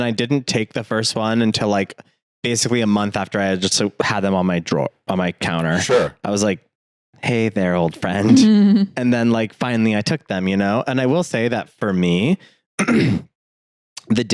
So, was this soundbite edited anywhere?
no; 0 cuts

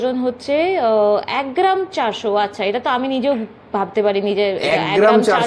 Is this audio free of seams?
yes; 0 cuts

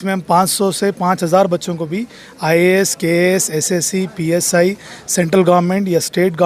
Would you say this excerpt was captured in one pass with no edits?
yes; 0 cuts

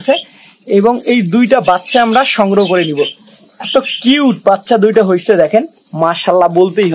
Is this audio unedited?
yes; 0 cuts

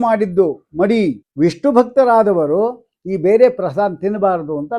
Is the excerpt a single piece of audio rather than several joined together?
no; 1 cut; at 1.2 s

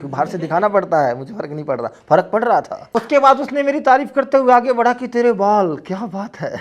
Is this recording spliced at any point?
yes; 1 cut; at 2.8 s

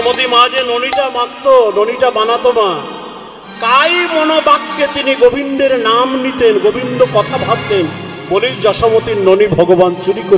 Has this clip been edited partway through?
no; 0 cuts

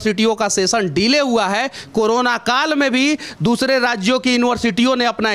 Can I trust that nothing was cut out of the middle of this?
yes; 0 cuts

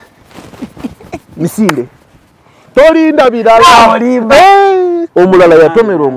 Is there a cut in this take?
yes; 1 cut; at 5.0 s

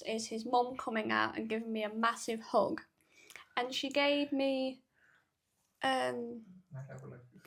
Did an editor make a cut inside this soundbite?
no; 0 cuts

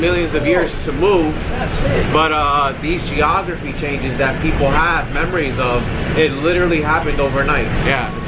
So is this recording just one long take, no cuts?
yes; 0 cuts

